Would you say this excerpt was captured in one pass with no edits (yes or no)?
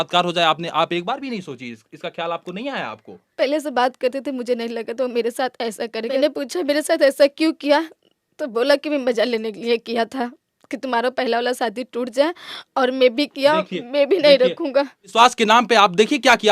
no